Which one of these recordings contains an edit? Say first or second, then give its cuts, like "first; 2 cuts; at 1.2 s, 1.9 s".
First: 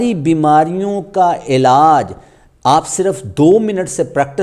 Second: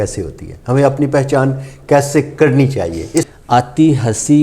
second; 1 cut; at 3.2 s